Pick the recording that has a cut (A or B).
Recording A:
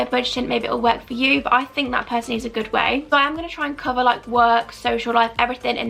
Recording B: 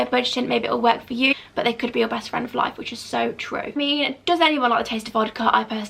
B